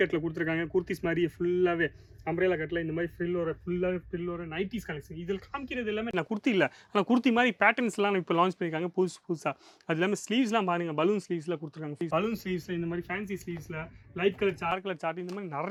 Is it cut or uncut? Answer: uncut